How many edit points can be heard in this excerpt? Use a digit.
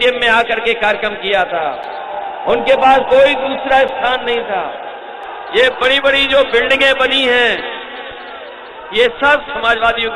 1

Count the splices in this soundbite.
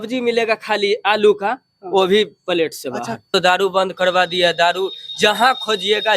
1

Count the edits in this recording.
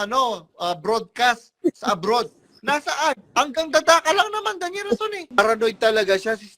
1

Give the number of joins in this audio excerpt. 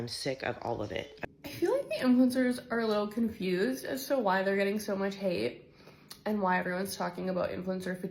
1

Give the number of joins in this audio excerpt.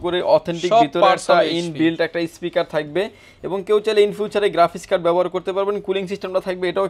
0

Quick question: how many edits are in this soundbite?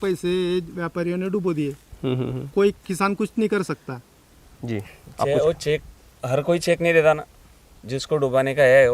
0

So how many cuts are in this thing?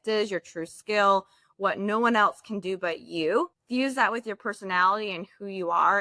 1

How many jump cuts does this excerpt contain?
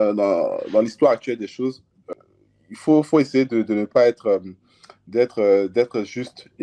1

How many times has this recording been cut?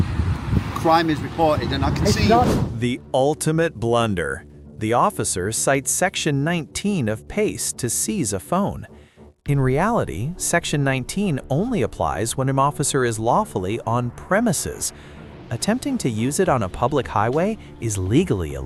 0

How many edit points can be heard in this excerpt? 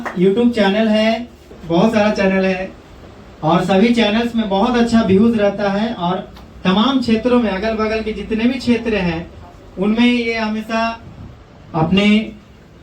1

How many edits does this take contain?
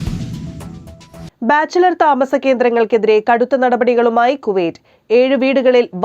1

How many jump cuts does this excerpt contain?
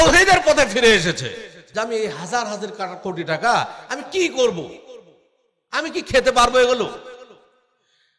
1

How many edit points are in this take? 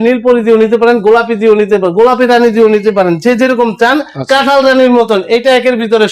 0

